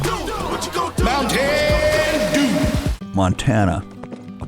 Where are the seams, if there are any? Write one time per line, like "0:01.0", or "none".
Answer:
0:03.0